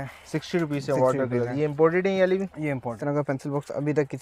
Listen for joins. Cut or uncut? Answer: cut